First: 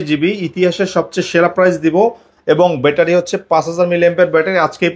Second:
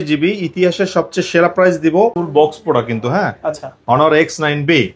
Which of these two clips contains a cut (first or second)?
second